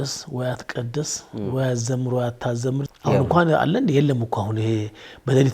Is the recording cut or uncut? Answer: cut